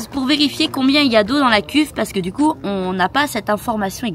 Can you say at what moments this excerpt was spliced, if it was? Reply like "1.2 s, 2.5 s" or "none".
none